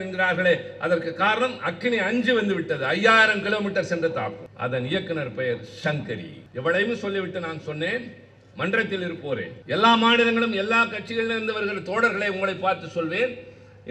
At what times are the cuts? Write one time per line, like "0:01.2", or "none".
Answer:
0:04.5
0:06.4
0:09.6